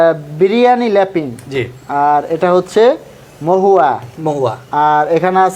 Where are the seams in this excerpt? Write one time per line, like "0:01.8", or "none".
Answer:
none